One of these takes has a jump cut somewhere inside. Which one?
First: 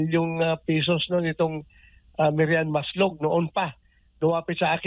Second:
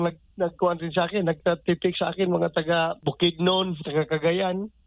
second; 1 cut; at 3.0 s

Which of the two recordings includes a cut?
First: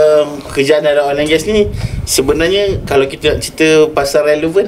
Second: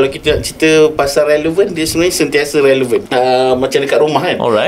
second; 1 cut; at 3.1 s

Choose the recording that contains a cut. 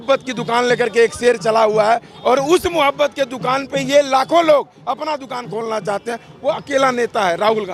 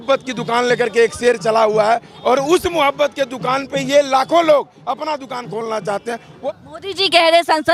second; 1 cut; at 6.5 s

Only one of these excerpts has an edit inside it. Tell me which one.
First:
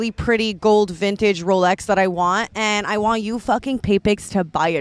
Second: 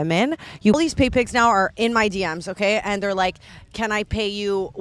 second; 2 cuts; at 0.8 s, 3.5 s

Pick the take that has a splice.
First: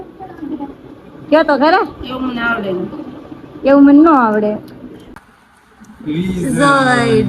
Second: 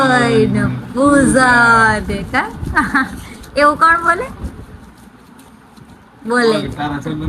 first; 1 cut; at 5.0 s

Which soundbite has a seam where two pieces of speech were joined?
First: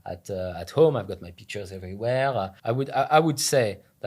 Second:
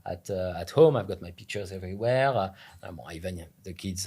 first; 1 cut; at 2.6 s

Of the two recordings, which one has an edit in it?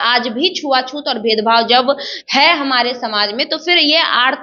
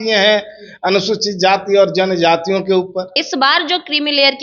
second; 1 cut; at 3.2 s

